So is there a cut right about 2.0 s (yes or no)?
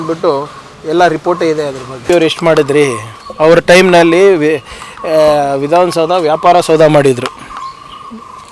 yes